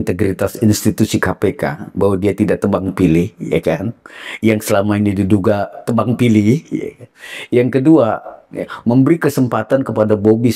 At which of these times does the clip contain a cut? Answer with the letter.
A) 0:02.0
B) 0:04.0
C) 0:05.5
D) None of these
D